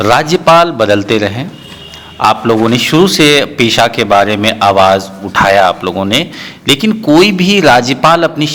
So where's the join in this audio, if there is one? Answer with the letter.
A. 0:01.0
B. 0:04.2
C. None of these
C